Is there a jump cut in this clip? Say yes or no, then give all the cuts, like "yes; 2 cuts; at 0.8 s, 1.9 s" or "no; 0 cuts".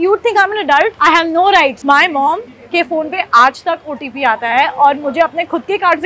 yes; 1 cut; at 1.8 s